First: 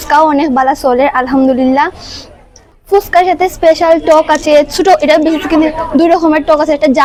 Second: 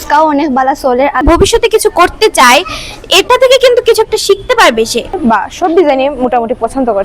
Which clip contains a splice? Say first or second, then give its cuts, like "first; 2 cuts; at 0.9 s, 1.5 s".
second; 2 cuts; at 1.2 s, 5.2 s